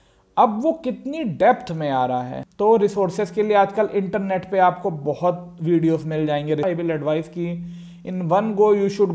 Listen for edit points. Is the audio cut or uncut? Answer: cut